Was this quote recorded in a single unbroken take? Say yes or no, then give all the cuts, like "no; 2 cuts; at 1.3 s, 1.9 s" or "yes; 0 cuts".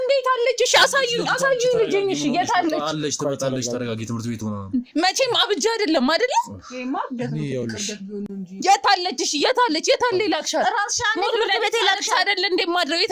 yes; 0 cuts